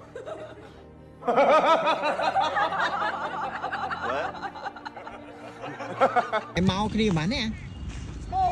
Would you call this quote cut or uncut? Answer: cut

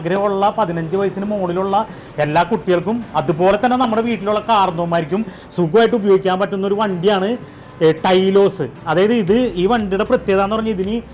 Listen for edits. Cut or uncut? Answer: uncut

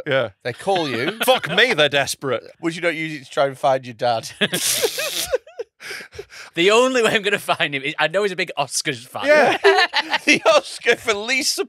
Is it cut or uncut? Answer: cut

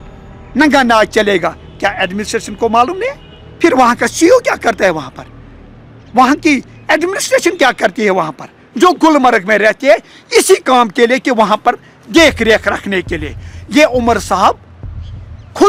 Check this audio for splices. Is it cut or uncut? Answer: uncut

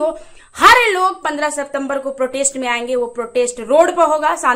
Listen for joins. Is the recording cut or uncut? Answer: uncut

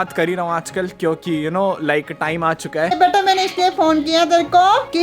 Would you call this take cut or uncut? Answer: cut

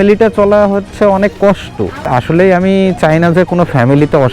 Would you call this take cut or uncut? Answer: cut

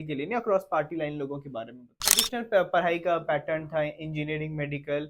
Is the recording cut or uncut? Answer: cut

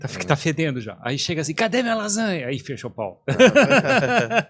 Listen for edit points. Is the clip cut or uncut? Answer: uncut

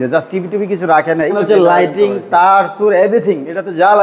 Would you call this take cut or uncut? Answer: cut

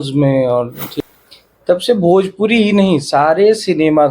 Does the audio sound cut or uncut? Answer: cut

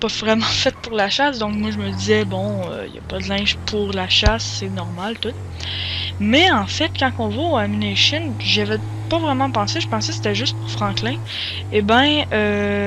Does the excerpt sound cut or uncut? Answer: cut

